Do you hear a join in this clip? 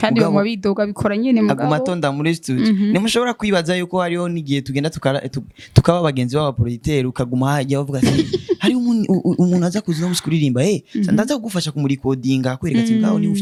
no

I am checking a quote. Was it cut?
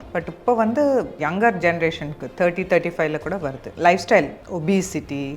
yes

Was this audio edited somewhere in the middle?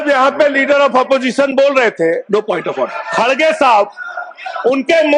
no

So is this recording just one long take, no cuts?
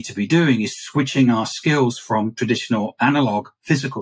yes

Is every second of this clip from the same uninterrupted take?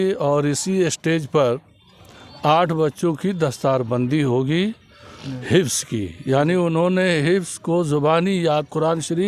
yes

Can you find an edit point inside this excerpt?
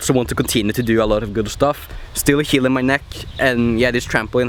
no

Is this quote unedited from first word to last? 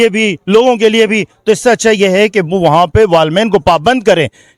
yes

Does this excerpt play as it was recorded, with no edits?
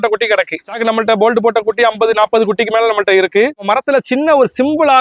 no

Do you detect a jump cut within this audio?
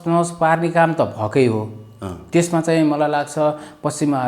no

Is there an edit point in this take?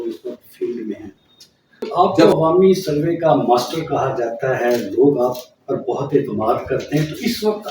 yes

